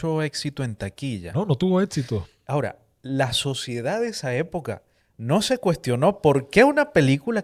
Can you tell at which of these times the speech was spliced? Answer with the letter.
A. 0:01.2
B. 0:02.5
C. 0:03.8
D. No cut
D